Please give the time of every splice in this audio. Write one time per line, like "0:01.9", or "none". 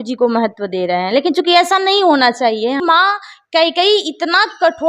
0:02.8